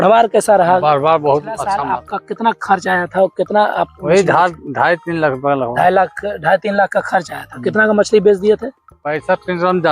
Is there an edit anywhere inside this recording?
yes; 1 cut; at 1.6 s

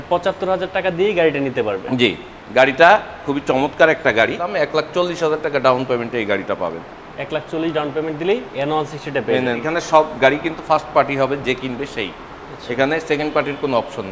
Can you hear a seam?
yes; 2 cuts; at 4.5 s, 9.7 s

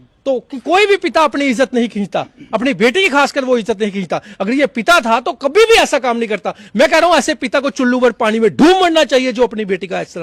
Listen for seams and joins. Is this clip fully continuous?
yes; 0 cuts

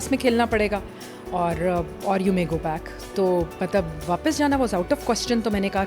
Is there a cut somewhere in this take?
no; 0 cuts

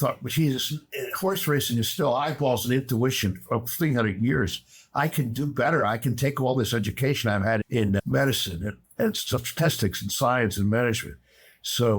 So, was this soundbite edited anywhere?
no; 0 cuts

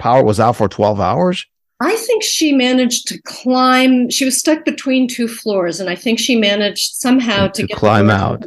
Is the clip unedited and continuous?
yes; 0 cuts

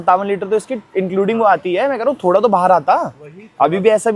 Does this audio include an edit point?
no; 0 cuts

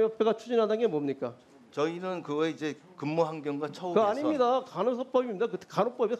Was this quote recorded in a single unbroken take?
yes; 0 cuts

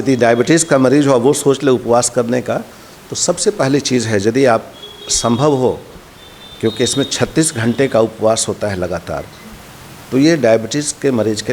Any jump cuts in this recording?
no; 0 cuts

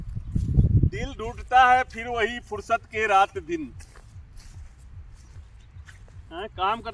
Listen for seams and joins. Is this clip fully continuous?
yes; 0 cuts

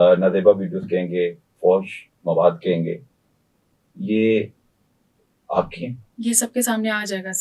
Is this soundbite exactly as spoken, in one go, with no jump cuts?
no; 1 cut; at 6.0 s

